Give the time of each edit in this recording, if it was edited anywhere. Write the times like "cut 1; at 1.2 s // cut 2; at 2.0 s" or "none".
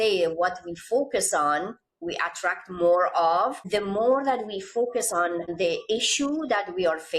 cut 1; at 3.6 s // cut 2; at 5.5 s